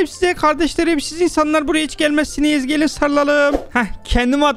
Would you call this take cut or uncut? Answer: cut